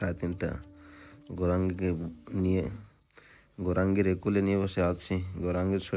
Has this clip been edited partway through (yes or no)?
no